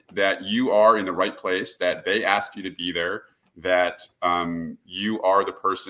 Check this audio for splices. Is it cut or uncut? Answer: uncut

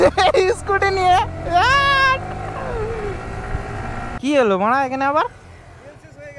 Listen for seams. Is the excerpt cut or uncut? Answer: cut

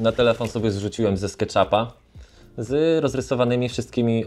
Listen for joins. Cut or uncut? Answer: uncut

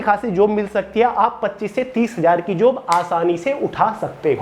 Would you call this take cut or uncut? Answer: uncut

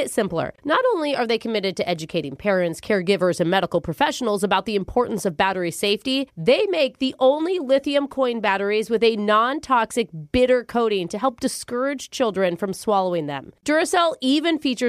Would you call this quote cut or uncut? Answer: uncut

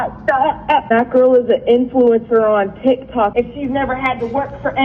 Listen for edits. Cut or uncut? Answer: cut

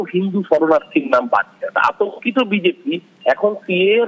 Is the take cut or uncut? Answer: cut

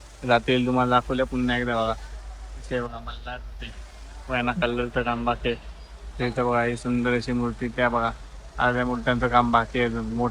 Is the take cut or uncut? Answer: uncut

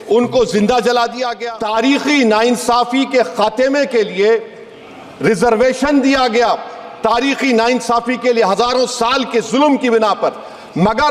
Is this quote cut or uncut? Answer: cut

